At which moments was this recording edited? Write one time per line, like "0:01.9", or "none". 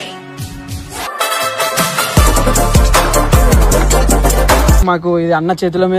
0:01.1
0:04.8